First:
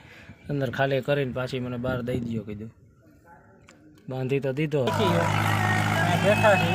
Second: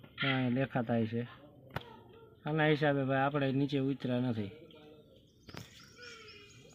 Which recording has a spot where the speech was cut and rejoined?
first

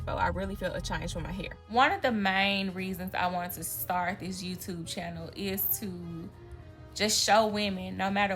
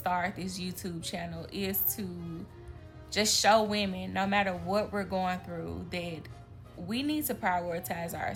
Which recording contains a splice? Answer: first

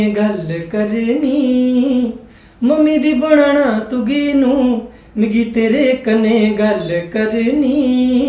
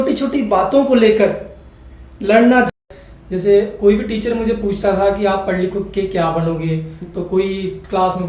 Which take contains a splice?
second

